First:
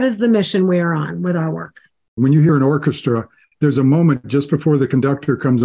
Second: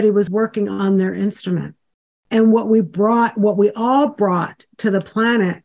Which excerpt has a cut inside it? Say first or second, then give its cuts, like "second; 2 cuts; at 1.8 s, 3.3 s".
first; 2 cuts; at 2.1 s, 3.4 s